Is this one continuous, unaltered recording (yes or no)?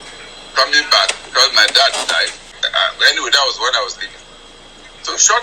no